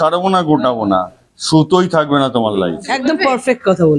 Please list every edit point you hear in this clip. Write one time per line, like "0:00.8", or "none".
0:03.0